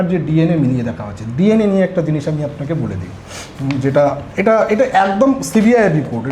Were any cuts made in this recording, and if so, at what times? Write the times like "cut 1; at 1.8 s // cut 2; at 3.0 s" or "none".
none